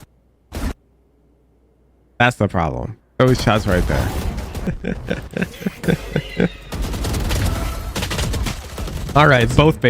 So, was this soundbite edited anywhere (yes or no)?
yes